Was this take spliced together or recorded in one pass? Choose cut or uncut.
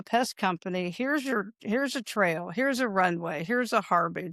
uncut